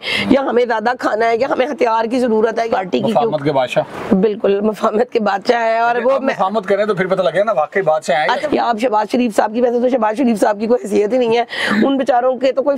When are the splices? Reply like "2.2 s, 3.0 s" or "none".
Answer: 2.7 s, 8.4 s